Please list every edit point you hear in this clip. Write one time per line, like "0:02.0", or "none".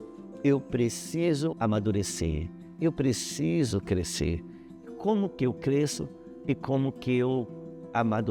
0:01.6

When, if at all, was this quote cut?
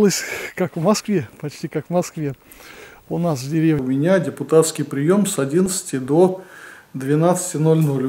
0:03.8

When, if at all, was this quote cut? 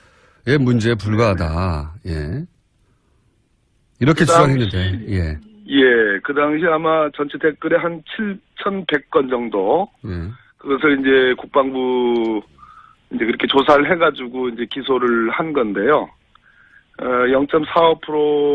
none

